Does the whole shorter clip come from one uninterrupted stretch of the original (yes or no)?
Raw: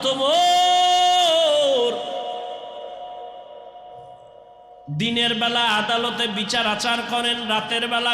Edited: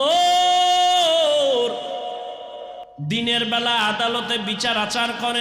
no